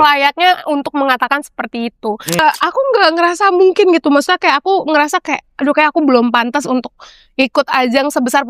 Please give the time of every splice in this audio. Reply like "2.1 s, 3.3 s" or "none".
2.4 s